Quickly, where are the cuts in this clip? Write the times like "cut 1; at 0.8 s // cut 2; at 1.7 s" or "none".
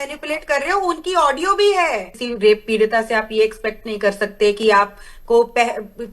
cut 1; at 2.2 s